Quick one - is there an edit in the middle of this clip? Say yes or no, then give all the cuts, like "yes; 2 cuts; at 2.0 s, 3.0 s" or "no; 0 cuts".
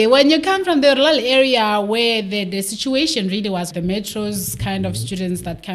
yes; 1 cut; at 3.7 s